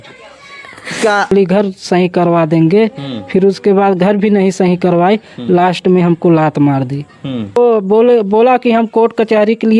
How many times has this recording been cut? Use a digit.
2